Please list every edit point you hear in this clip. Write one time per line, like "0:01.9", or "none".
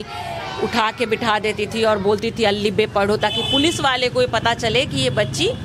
none